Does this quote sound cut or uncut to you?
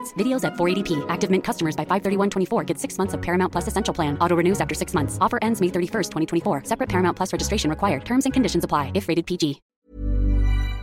cut